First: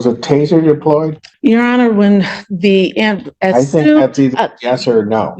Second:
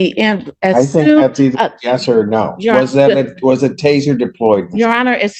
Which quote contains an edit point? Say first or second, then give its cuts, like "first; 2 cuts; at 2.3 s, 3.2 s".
first; 1 cut; at 1.2 s